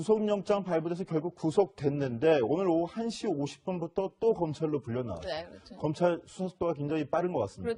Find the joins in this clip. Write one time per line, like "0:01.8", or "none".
none

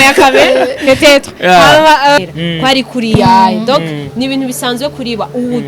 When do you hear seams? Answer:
0:02.2

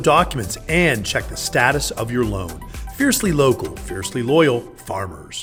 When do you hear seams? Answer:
none

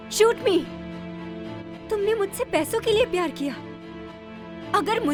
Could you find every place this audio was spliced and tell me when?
none

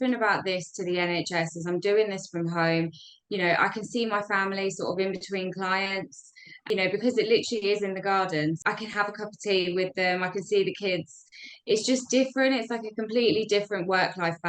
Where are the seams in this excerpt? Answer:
0:06.6
0:08.6

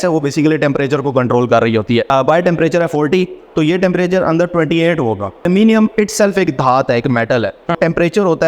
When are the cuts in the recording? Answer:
0:02.1
0:05.4
0:07.8

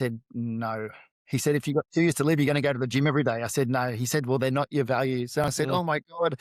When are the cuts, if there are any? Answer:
none

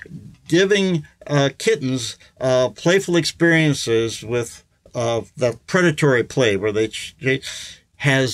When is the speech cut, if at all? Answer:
none

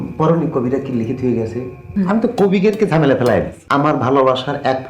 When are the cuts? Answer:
0:01.8
0:03.6

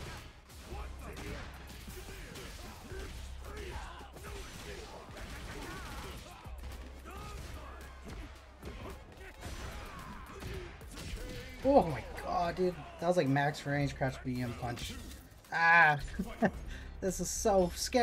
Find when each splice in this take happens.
none

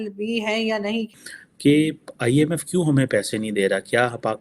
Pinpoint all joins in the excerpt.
0:01.1

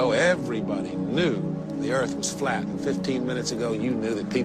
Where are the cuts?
0:02.6

